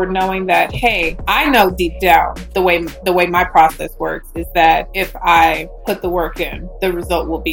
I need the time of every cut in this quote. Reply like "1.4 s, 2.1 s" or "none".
1.1 s, 2.4 s, 5.0 s, 5.7 s, 6.6 s